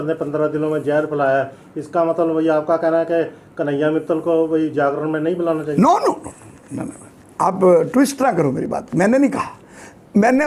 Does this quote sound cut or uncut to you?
uncut